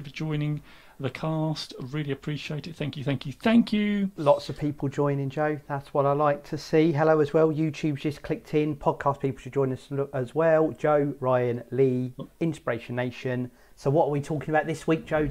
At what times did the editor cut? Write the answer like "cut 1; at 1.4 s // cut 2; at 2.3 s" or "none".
none

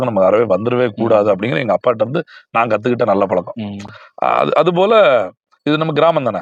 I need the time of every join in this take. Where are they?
none

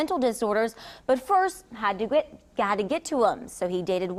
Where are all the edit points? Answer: none

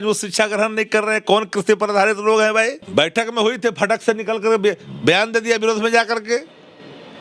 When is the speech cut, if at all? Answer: cut 1; at 2.8 s

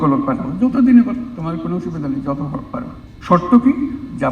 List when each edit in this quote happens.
cut 1; at 3.0 s

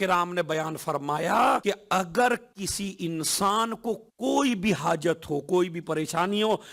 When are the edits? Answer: cut 1; at 1.6 s

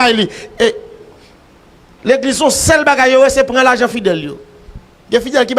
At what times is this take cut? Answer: cut 1; at 4.5 s

